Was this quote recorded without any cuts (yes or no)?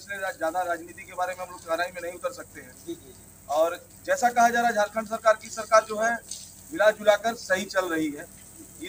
yes